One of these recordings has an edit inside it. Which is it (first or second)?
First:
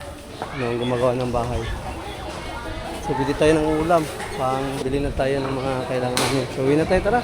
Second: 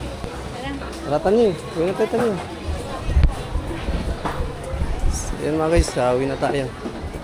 first